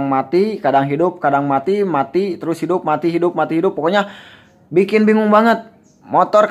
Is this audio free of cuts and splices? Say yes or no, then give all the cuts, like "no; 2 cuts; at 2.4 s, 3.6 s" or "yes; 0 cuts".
yes; 0 cuts